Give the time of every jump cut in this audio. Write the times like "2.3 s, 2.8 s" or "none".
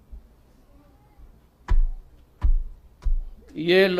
none